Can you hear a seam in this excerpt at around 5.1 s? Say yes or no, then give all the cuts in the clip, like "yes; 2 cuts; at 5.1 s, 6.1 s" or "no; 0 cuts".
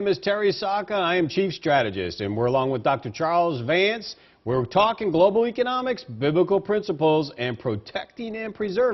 yes; 1 cut; at 5.1 s